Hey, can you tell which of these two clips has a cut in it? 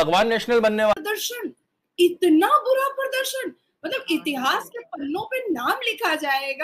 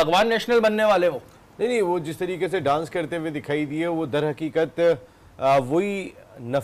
first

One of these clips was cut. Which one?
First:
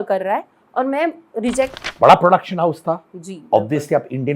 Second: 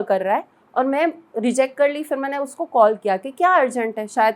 first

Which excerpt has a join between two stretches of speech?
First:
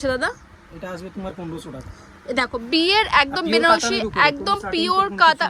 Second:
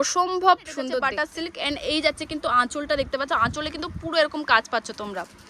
second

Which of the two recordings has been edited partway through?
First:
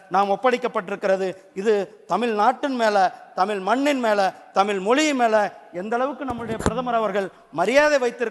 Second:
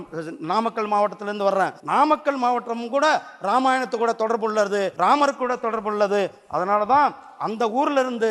second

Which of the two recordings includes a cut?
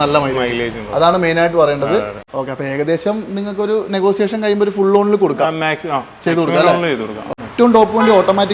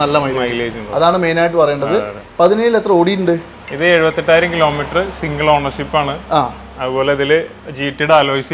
first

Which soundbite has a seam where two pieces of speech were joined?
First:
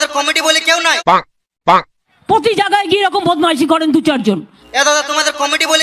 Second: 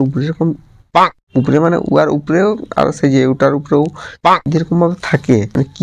first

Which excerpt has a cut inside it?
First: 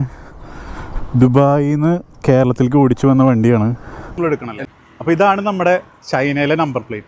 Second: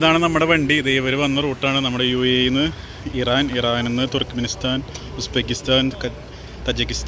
first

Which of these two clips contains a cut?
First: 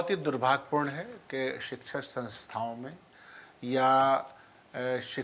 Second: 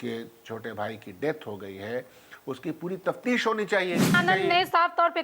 second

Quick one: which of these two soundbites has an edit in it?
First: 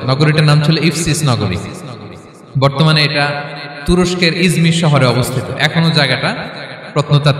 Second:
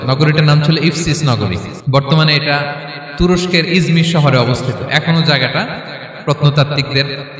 second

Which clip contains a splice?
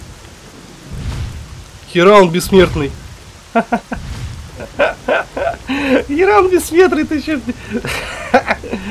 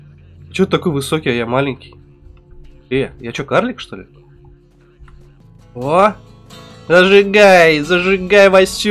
second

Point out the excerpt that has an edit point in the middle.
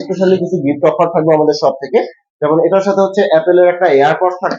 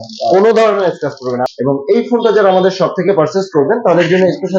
second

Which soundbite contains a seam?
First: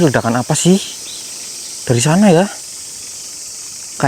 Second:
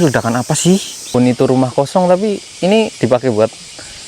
second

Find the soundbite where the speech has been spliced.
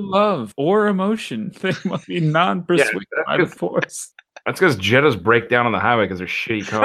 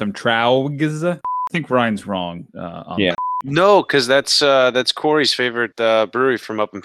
second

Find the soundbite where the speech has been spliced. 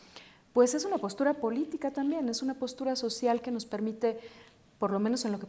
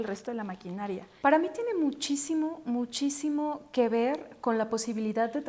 second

